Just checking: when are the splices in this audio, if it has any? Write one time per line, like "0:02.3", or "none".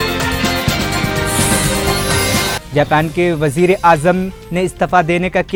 none